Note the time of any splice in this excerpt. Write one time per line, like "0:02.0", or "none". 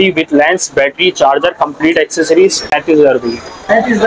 0:02.7